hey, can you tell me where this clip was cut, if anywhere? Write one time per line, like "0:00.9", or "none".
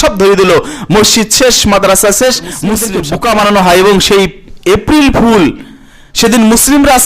0:02.9